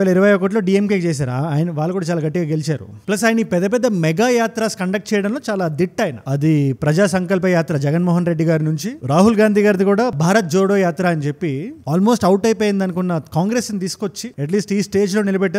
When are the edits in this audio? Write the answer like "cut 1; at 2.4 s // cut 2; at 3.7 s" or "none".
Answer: none